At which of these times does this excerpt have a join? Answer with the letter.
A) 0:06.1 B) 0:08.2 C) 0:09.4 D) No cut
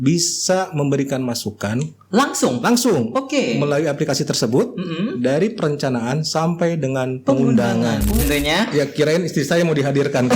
B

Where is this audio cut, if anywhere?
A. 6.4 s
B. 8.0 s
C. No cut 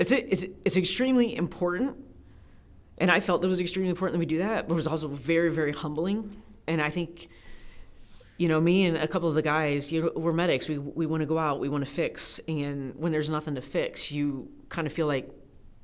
A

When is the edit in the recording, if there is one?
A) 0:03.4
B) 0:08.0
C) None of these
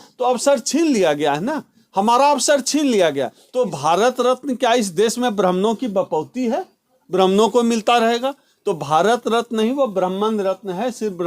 A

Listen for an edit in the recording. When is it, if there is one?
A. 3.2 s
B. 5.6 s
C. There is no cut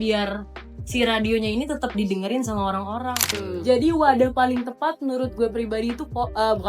A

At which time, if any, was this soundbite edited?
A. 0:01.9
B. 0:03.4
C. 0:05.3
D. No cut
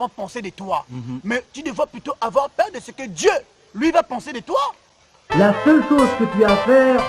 C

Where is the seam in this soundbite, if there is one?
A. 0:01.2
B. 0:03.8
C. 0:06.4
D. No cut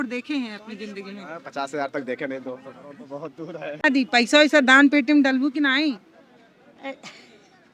B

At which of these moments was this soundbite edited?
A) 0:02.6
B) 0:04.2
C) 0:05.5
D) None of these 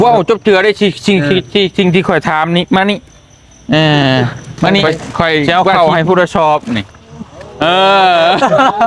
C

